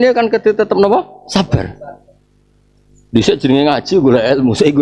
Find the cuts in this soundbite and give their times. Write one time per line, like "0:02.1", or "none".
none